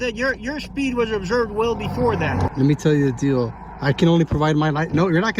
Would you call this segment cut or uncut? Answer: cut